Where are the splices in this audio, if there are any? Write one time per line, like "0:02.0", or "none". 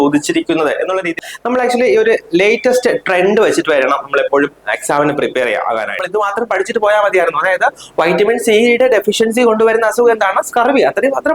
0:01.2
0:06.0